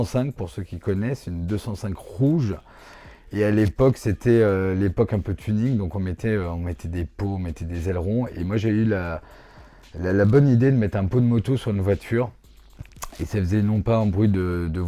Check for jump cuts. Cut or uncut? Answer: uncut